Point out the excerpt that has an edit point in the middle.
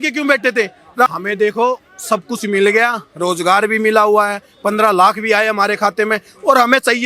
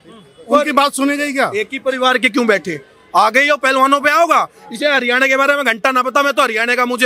first; 1 cut; at 1.1 s

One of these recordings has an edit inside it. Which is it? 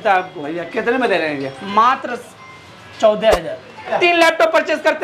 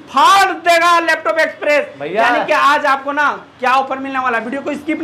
first; 1 cut; at 3.9 s

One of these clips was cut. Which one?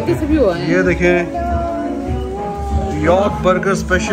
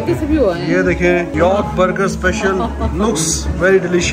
second; 1 cut; at 1.3 s

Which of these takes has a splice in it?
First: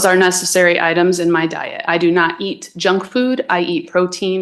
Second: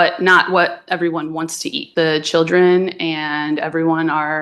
second; 1 cut; at 1.8 s

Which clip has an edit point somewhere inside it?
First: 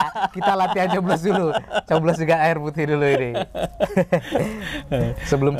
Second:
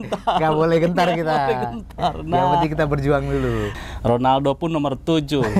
second; 1 cut; at 3.7 s

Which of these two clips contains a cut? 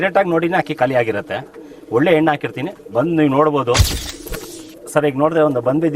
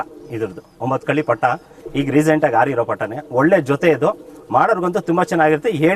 first; 1 cut; at 3.9 s

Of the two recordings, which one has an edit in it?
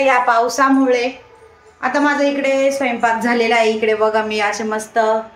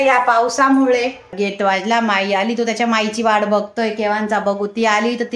second; 1 cut; at 1.3 s

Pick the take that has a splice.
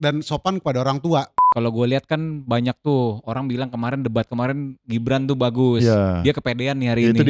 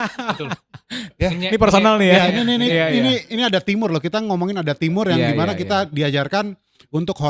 first; 1 cut; at 1.4 s

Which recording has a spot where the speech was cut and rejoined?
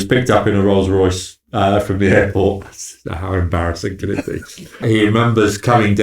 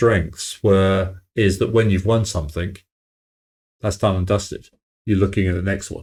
first; 1 cut; at 4.8 s

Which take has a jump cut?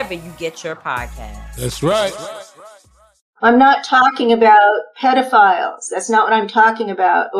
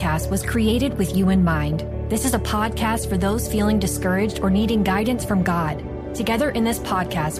first; 1 cut; at 3.3 s

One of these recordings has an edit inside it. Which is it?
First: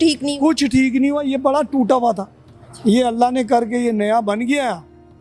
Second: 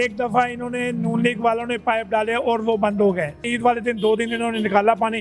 second; 1 cut; at 3.5 s

